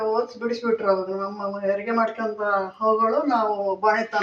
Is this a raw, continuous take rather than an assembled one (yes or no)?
yes